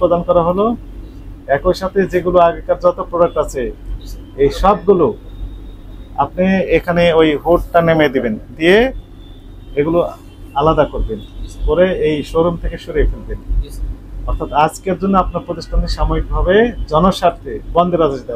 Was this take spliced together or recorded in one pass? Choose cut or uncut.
uncut